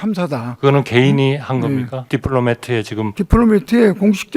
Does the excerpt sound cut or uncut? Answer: cut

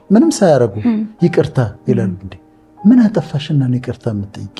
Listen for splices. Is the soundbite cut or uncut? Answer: uncut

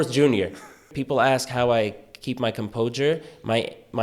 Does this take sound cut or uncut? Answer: cut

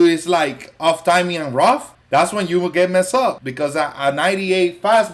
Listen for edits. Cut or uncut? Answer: cut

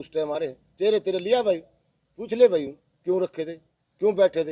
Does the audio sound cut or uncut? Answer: uncut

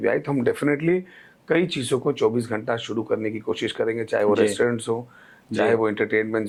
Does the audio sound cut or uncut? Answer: uncut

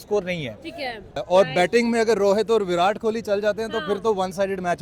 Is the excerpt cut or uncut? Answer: cut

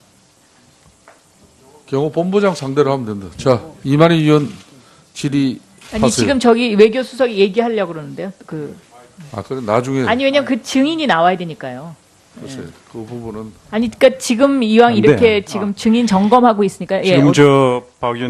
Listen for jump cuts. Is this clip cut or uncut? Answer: cut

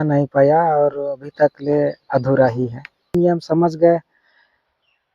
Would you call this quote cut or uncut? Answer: cut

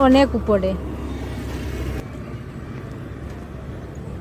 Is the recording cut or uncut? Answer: cut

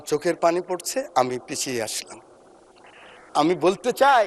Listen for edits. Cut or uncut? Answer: uncut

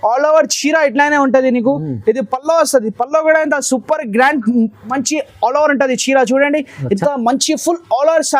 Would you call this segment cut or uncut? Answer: cut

